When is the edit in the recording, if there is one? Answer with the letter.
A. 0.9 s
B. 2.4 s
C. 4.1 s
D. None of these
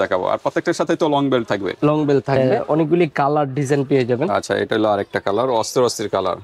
B